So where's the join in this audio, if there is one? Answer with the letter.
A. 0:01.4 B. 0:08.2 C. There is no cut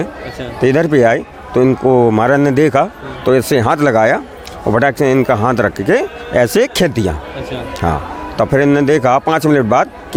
C